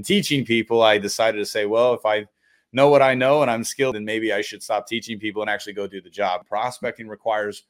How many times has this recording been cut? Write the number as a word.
two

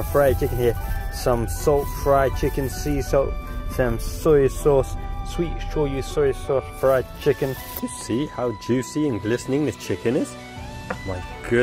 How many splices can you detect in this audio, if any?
one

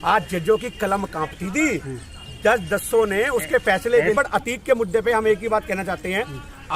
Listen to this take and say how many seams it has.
one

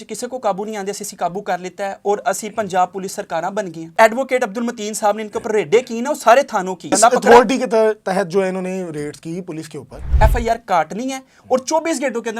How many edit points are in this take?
three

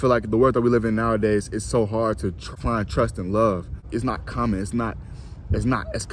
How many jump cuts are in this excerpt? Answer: two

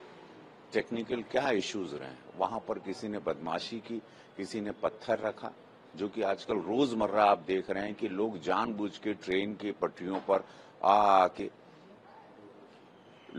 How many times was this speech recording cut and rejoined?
zero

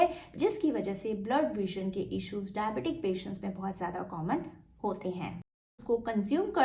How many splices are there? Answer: one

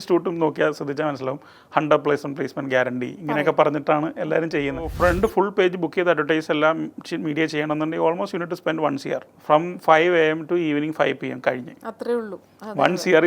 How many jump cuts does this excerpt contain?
two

